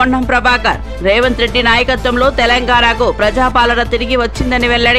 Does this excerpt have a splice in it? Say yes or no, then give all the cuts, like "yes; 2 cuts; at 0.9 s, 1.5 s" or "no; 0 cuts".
no; 0 cuts